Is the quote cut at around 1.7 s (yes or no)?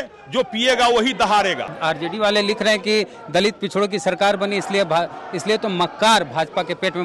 yes